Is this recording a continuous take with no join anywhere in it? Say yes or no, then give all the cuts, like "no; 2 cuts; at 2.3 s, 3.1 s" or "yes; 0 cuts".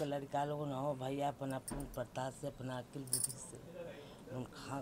yes; 0 cuts